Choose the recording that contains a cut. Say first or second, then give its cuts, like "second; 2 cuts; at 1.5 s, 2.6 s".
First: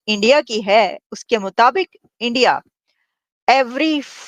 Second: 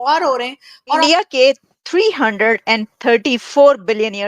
second; 1 cut; at 1.0 s